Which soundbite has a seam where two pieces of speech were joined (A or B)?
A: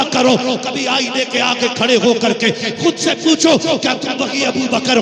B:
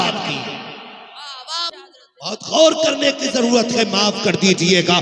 B